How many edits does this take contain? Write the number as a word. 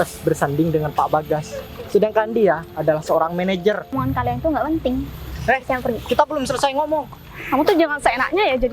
one